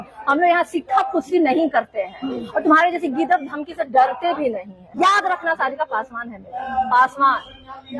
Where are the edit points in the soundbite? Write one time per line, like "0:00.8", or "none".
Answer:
0:04.8